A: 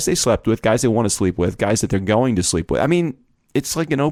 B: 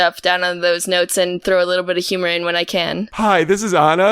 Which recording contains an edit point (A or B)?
B